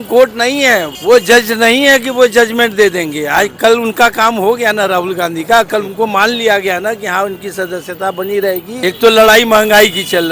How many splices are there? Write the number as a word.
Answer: two